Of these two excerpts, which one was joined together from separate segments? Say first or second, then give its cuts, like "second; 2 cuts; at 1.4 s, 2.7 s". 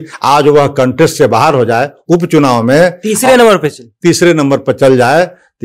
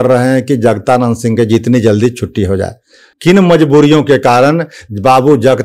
second; 1 cut; at 3.1 s